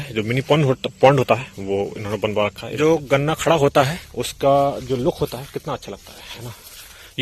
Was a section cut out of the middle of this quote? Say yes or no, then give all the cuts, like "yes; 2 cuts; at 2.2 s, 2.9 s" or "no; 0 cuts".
yes; 1 cut; at 2.6 s